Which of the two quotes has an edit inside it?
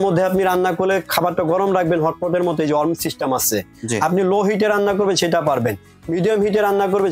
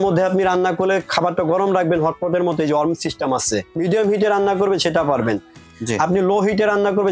second; 2 cuts; at 3.6 s, 5.7 s

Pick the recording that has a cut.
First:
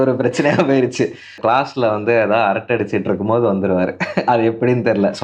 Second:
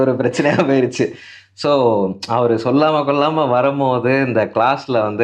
first; 1 cut; at 1.4 s

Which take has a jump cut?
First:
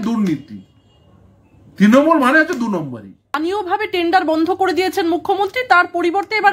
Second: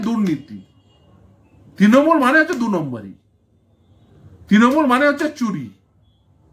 first; 1 cut; at 3.4 s

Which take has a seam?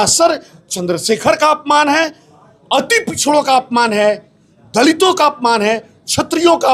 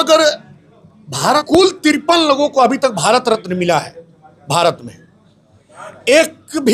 second; 1 cut; at 1.4 s

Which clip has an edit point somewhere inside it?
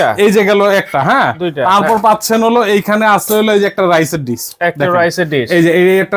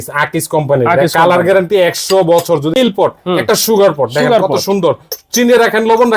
second; 1 cut; at 2.7 s

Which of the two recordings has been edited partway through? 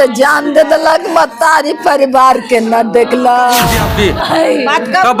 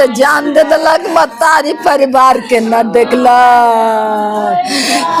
first; 1 cut; at 3.8 s

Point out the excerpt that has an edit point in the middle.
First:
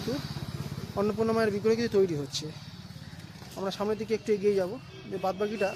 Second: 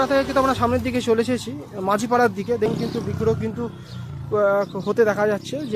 second; 1 cut; at 2.7 s

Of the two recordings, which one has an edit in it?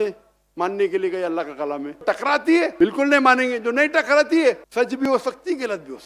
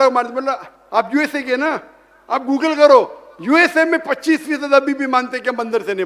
first; 3 cuts; at 2.0 s, 2.7 s, 4.6 s

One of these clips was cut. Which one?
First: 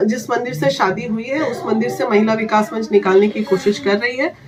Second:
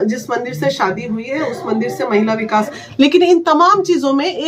second; 1 cut; at 2.8 s

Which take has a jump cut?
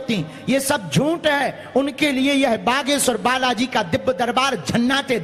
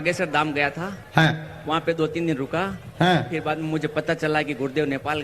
second; 1 cut; at 2.0 s

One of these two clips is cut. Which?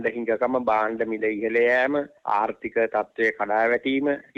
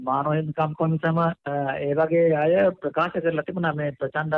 second; 1 cut; at 1.4 s

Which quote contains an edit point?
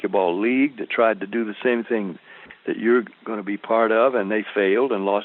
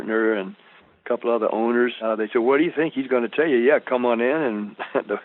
second; 1 cut; at 2.0 s

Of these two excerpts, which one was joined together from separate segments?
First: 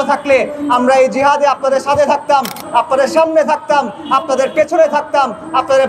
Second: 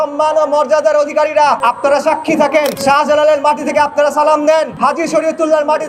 second; 3 cuts; at 1.6 s, 2.8 s, 4.7 s

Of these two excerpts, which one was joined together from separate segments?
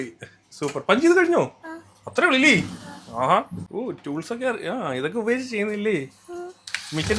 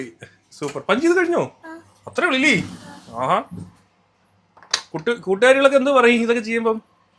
first; 1 cut; at 3.6 s

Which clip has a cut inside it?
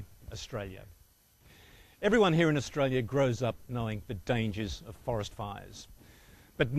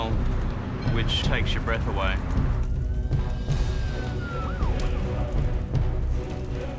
first; 1 cut; at 1.9 s

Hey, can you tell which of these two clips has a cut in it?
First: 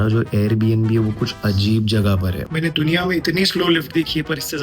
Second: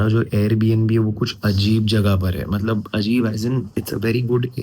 first; 1 cut; at 2.4 s

